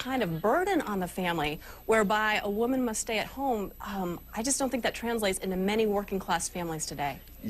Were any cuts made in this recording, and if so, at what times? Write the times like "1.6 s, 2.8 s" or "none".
none